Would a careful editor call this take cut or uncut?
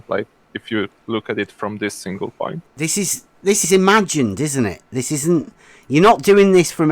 cut